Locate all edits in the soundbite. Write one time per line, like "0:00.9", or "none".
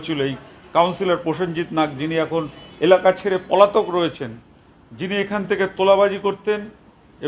none

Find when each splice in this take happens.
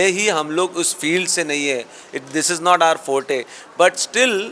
none

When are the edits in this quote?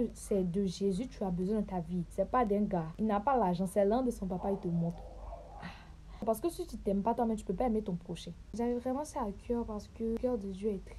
0:02.1
0:02.9
0:06.2
0:08.5
0:10.2

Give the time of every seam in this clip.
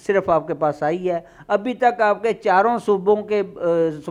none

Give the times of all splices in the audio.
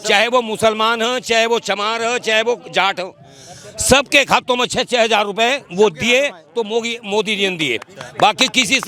none

